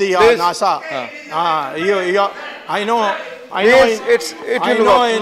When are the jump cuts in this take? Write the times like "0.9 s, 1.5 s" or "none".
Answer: none